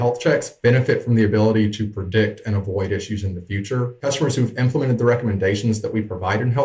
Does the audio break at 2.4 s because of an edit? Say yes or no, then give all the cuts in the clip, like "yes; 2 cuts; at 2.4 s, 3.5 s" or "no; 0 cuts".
no; 1 cut; at 4.0 s